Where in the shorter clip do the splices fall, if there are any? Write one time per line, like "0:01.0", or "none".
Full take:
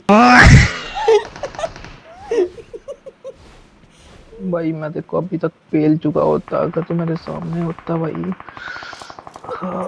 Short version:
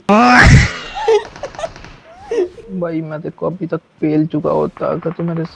0:02.6